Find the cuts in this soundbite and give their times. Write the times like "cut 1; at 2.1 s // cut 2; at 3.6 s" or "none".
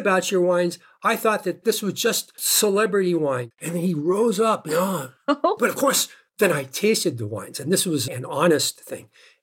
cut 1; at 1.6 s // cut 2; at 3.5 s